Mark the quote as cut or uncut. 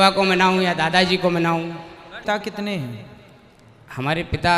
cut